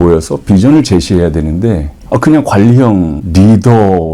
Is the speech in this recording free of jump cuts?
no; 2 cuts; at 1.9 s, 3.2 s

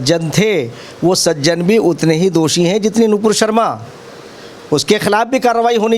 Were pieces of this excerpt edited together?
no; 0 cuts

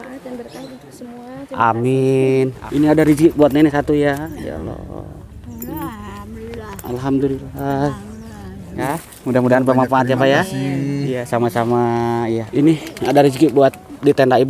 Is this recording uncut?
no; 3 cuts; at 2.6 s, 8.9 s, 12.5 s

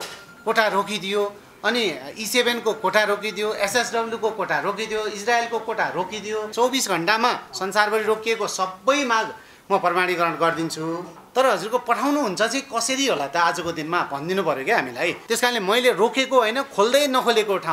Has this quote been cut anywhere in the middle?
yes; 3 cuts; at 6.5 s, 11.1 s, 15.2 s

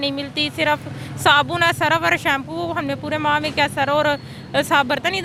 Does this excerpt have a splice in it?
no; 0 cuts

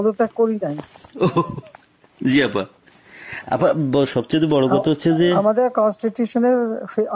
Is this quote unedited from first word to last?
yes; 0 cuts

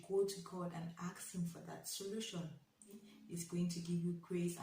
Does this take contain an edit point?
yes; 1 cut; at 3.0 s

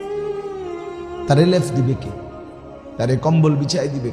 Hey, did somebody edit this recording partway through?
yes; 1 cut; at 1.3 s

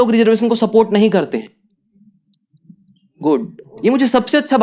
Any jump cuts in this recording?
yes; 2 cuts; at 1.5 s, 3.6 s

